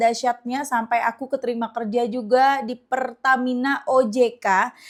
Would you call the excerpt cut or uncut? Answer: uncut